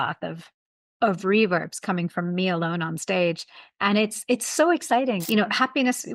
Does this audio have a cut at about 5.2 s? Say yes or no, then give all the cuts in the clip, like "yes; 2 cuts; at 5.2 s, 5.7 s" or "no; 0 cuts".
yes; 1 cut; at 5.2 s